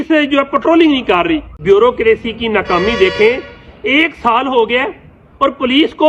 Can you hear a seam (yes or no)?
yes